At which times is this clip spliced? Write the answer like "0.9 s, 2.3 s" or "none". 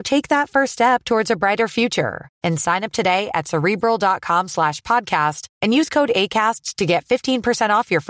none